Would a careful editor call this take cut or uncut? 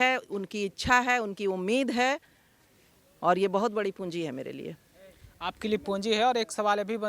uncut